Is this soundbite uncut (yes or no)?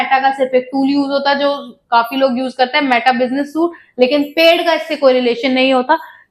yes